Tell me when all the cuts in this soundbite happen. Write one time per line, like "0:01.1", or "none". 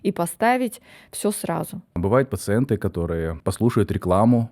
0:01.8